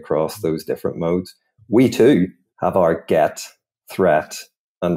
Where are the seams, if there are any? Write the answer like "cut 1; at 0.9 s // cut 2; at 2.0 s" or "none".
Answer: cut 1; at 2.4 s